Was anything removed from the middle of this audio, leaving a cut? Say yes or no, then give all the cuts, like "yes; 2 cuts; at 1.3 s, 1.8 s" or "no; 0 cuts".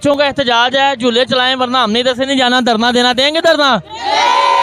no; 0 cuts